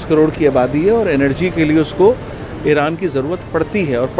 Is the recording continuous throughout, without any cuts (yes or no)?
yes